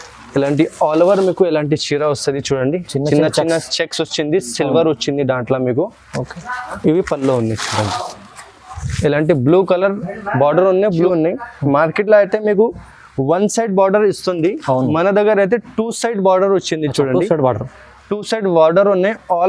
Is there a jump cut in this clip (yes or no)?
yes